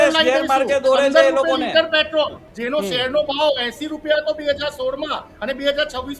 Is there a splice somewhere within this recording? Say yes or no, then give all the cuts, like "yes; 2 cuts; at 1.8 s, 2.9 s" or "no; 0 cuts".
yes; 1 cut; at 2.5 s